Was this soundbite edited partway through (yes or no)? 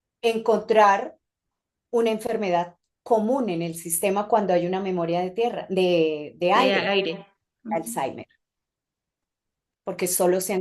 no